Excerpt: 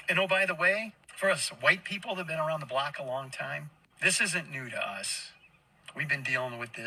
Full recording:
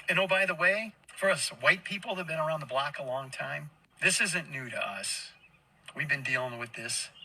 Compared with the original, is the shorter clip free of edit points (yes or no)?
yes